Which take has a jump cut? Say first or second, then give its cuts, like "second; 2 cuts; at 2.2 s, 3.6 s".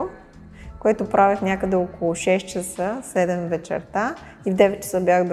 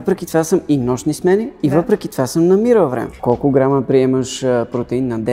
second; 1 cut; at 3.2 s